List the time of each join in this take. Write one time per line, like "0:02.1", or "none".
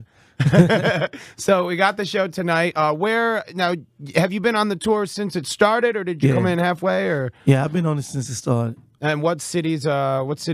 none